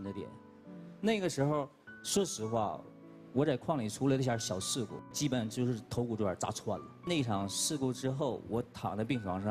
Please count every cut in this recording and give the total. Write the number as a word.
two